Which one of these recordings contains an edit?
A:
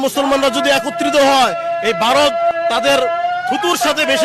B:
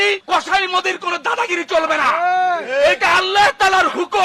A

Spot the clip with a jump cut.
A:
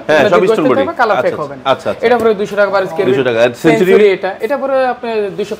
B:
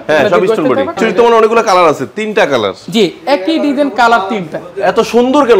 B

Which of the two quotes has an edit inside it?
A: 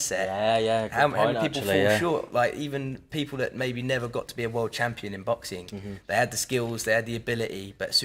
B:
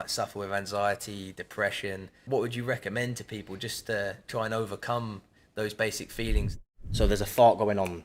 B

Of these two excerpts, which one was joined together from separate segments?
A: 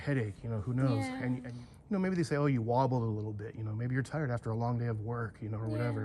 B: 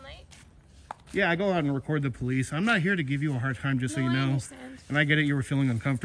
A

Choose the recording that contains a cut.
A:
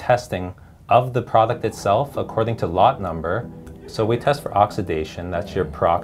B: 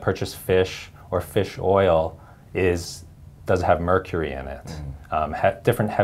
A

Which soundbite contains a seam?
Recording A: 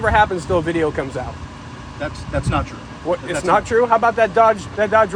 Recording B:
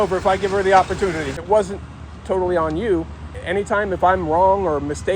B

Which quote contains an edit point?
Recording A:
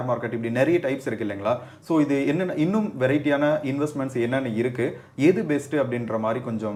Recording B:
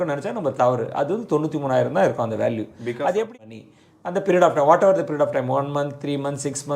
B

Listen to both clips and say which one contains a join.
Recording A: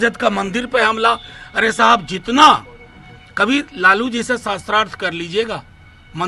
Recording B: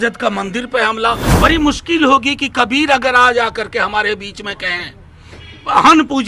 B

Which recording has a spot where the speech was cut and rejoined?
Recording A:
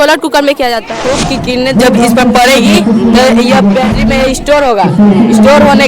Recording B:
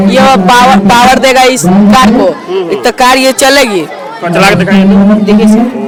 A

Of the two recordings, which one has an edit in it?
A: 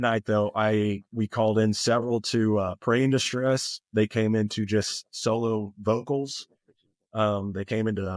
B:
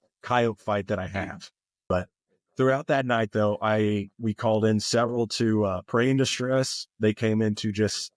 B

